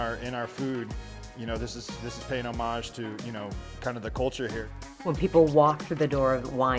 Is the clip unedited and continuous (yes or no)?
no